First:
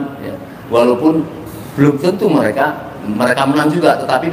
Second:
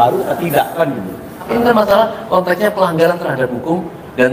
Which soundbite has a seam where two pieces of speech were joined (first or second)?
second